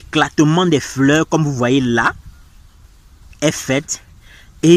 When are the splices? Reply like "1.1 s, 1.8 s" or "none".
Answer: none

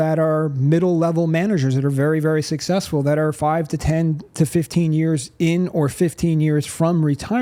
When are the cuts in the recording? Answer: none

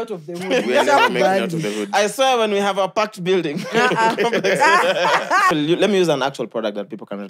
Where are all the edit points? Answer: 5.5 s

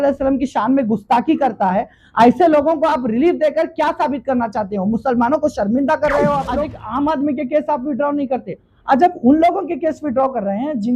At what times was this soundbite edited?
6.8 s

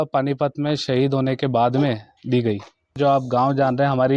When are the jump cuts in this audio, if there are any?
3.0 s

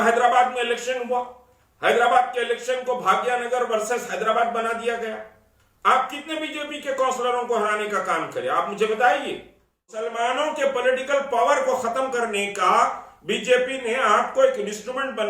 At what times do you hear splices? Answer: 10.1 s

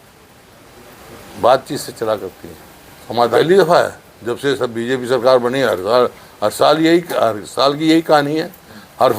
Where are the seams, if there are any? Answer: 3.4 s

